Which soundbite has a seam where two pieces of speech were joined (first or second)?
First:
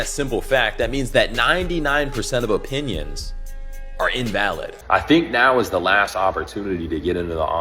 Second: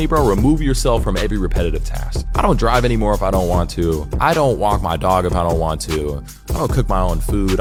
first